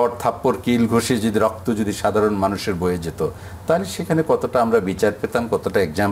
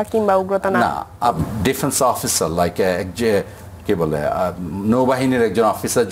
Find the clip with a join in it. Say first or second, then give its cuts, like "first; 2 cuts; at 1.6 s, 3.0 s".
second; 1 cut; at 1.4 s